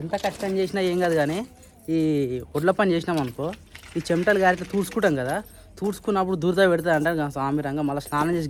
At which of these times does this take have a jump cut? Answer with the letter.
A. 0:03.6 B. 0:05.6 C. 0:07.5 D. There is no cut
D